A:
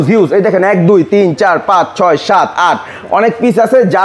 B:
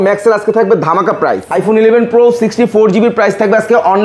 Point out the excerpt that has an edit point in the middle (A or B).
B